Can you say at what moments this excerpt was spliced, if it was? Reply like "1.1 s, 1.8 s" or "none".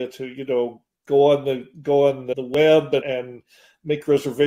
2.2 s, 3.1 s